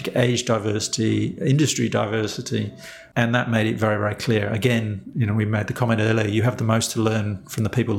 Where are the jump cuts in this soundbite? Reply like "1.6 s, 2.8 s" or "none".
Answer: none